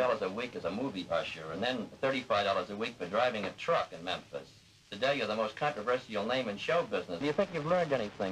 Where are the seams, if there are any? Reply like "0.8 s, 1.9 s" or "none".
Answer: 7.2 s